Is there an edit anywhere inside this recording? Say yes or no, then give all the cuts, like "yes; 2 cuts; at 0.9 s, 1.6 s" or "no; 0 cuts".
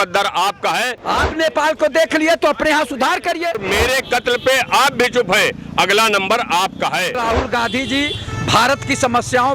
yes; 3 cuts; at 1.0 s, 3.6 s, 7.2 s